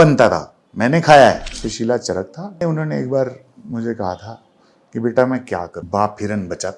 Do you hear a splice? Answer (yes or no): yes